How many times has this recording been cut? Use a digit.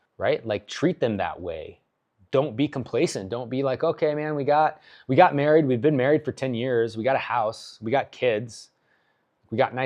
0